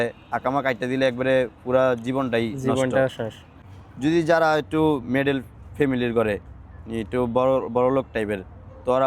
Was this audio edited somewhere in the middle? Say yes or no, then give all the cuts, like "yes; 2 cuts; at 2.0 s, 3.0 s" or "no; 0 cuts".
yes; 1 cut; at 3.7 s